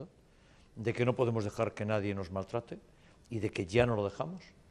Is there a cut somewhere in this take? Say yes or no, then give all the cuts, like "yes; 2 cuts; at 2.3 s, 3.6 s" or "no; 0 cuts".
no; 0 cuts